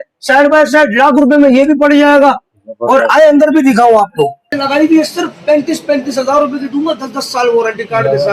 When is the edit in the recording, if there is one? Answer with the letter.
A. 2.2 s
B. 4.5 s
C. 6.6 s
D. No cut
B